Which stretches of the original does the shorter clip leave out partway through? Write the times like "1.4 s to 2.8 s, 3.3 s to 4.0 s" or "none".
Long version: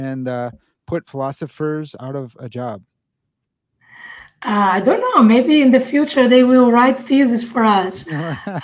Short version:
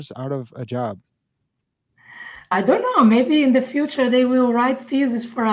4.4 s to 4.7 s